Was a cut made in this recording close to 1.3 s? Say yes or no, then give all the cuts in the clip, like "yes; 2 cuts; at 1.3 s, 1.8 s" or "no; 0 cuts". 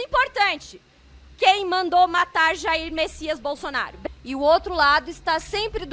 no; 1 cut; at 4.0 s